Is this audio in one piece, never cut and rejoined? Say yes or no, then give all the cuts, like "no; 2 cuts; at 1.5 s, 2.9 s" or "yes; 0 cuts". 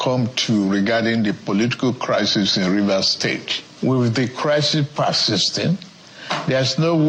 yes; 0 cuts